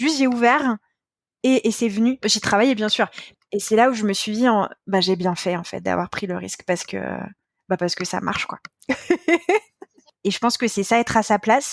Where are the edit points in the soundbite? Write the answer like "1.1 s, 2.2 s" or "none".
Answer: 3.1 s, 9.8 s